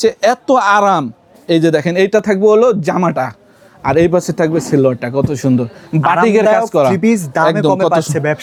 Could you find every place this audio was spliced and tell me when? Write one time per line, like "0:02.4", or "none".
none